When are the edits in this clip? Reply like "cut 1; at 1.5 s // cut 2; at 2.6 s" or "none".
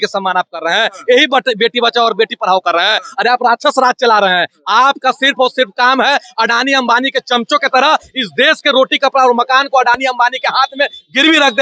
none